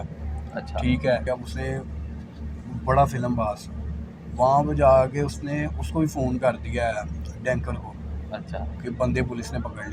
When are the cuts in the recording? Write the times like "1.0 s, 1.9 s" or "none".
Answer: 1.2 s